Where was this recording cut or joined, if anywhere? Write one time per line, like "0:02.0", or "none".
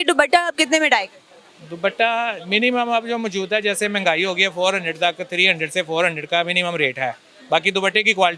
none